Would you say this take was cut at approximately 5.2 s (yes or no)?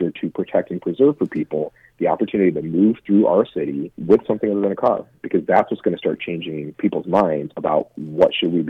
no